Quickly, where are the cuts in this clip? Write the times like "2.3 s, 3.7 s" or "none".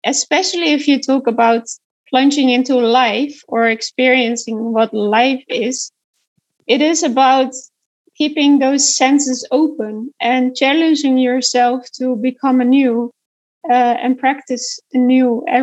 1.8 s, 6.4 s